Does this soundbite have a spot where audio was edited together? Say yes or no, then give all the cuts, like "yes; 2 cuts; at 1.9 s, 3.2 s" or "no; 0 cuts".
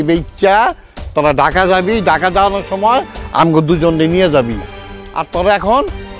no; 0 cuts